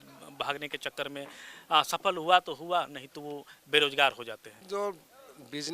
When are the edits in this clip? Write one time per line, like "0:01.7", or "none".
0:04.6